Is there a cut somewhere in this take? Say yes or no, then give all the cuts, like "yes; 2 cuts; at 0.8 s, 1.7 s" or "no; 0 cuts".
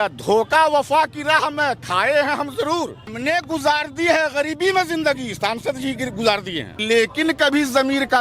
yes; 2 cuts; at 3.1 s, 6.8 s